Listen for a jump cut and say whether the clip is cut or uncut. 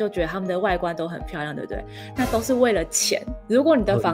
uncut